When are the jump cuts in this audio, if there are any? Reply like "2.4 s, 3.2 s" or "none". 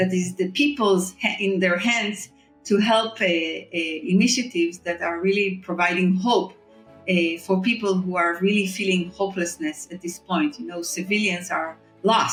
none

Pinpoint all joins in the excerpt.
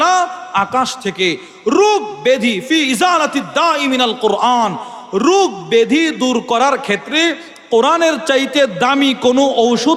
none

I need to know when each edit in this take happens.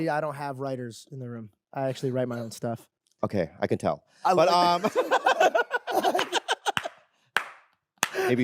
none

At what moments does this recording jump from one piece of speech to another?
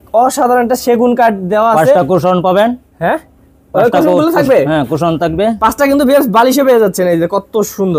none

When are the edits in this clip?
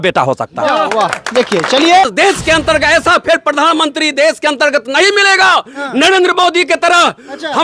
2.0 s

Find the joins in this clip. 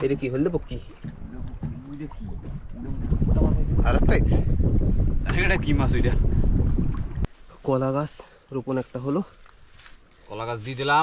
7.2 s

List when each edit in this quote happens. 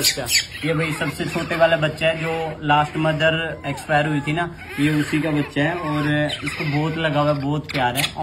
none

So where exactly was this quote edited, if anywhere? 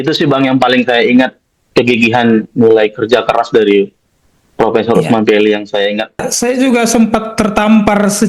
6.2 s

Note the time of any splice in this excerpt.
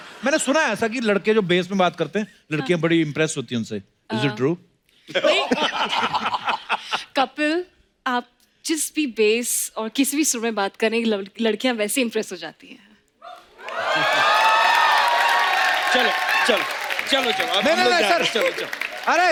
none

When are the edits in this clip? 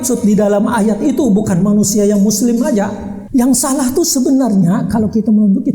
3.2 s

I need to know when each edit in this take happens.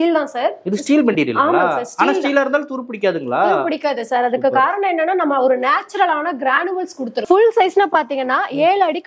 7.3 s

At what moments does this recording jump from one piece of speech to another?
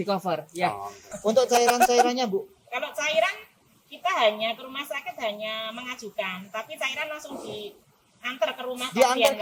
1.1 s

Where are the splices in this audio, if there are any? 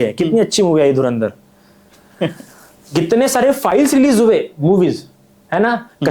none

